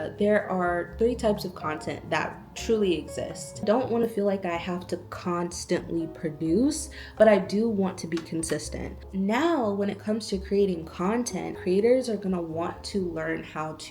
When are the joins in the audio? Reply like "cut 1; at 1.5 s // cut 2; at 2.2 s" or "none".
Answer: cut 1; at 3.6 s // cut 2; at 8.9 s